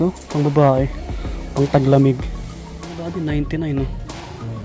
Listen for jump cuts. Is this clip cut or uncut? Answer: cut